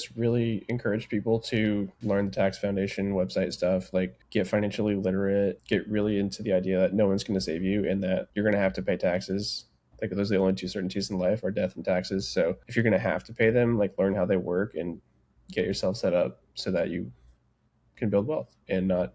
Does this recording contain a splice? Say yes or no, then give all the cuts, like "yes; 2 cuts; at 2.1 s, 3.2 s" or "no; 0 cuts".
yes; 5 cuts; at 2.0 s, 4.2 s, 5.6 s, 8.3 s, 12.6 s